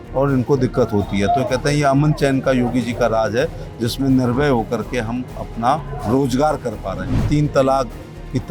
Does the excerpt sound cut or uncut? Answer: cut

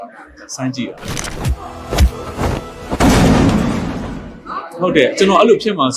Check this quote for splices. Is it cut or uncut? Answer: cut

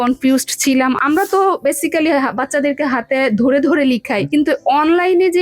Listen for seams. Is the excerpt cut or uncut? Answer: cut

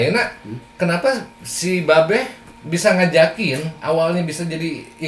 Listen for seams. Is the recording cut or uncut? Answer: uncut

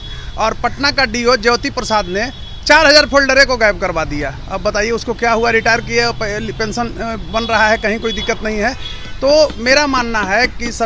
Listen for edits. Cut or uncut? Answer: uncut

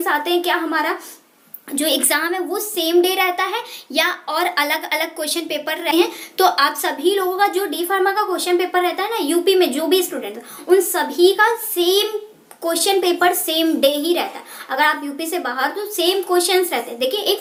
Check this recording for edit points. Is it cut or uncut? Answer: uncut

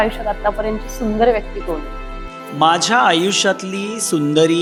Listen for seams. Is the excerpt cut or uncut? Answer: uncut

